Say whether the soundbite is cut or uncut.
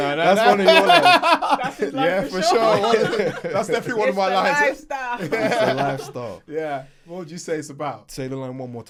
uncut